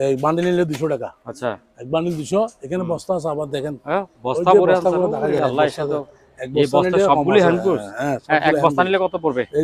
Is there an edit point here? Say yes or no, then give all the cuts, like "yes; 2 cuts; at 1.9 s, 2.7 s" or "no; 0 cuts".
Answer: no; 0 cuts